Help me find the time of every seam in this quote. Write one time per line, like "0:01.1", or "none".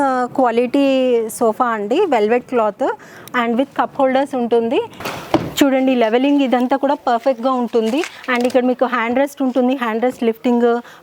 0:05.0